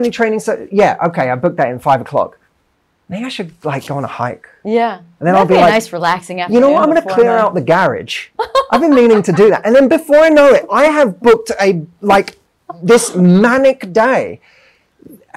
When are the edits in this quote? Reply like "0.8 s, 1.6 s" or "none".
none